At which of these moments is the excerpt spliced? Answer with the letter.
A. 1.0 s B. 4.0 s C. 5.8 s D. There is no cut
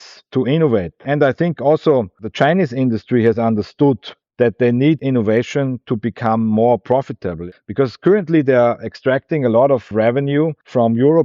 A